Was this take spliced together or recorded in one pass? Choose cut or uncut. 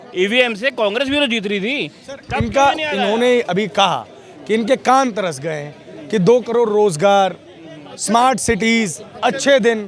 uncut